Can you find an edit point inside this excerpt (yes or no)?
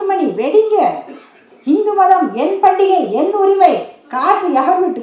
no